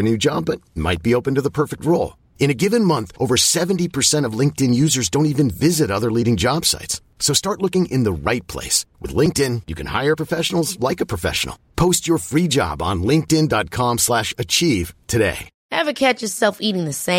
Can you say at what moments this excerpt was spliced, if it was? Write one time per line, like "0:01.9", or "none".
0:15.5